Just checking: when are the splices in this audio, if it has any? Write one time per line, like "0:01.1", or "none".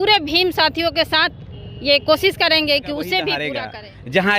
0:03.5